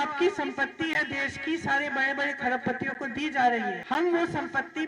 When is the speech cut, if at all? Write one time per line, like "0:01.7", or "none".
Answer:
0:03.8